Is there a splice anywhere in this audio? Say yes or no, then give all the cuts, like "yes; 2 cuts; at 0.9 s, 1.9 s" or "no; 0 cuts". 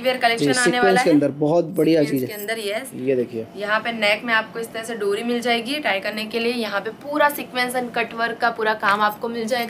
no; 0 cuts